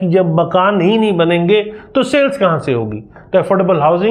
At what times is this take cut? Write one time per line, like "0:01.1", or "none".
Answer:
none